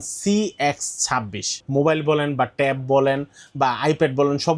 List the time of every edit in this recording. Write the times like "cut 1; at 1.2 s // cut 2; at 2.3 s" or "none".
cut 1; at 1.6 s

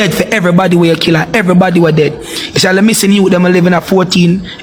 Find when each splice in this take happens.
none

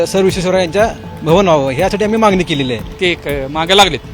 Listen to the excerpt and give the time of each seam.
cut 1; at 2.9 s

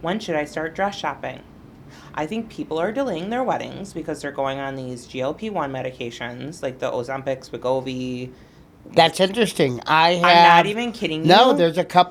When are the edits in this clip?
none

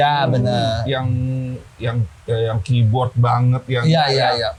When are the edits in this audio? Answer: none

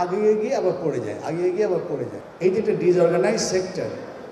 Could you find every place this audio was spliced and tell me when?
cut 1; at 2.2 s

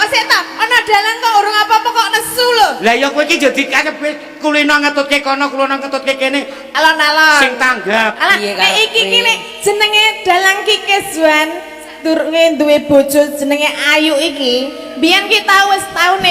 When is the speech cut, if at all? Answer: cut 1; at 8.2 s

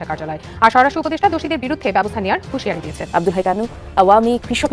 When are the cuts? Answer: cut 1; at 3.0 s

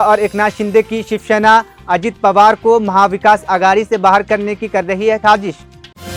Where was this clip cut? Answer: none

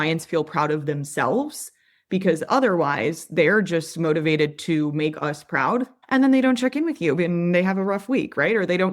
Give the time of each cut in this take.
cut 1; at 6.0 s

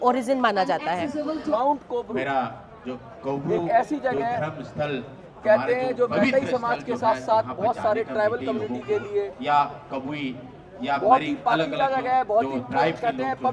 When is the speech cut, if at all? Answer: cut 1; at 1.5 s

